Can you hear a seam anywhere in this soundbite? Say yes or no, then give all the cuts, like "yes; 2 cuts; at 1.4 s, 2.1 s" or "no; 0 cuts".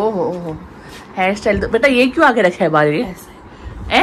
no; 0 cuts